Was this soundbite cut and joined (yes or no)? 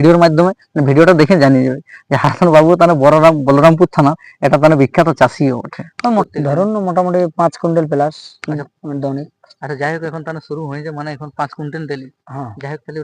yes